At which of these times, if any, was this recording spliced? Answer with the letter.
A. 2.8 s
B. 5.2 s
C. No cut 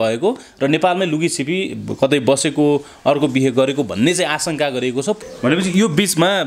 B